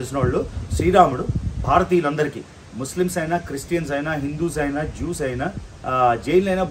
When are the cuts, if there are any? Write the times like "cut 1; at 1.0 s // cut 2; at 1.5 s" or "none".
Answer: none